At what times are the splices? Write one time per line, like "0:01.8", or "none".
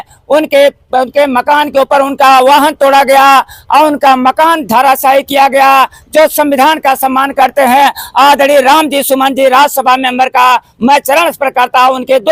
none